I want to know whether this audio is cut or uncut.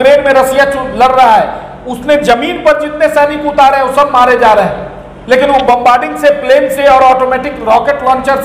uncut